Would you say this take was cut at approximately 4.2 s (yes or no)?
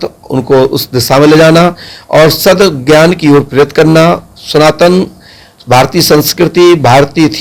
no